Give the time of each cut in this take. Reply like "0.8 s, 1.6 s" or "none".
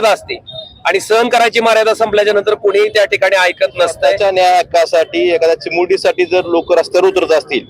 4.2 s